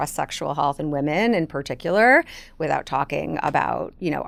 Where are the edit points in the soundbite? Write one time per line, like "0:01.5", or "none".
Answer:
none